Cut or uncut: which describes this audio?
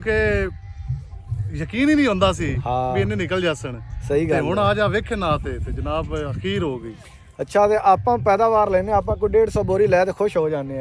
uncut